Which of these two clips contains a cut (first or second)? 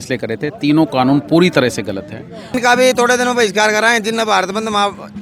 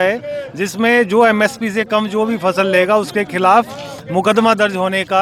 first